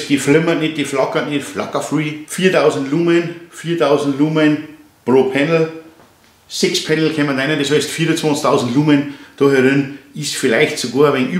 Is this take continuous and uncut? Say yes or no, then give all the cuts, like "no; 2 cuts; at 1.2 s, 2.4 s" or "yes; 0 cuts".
yes; 0 cuts